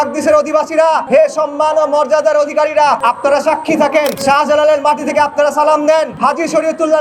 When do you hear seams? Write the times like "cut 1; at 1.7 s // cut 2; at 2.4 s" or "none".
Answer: cut 1; at 1.0 s // cut 2; at 3.0 s // cut 3; at 4.2 s // cut 4; at 6.1 s